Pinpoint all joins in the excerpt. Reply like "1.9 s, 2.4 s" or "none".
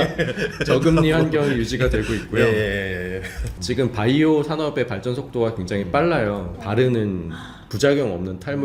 6.5 s